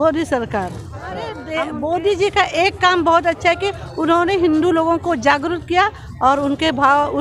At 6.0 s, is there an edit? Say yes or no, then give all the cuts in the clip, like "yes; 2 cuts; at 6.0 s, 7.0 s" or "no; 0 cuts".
no; 1 cut; at 1.4 s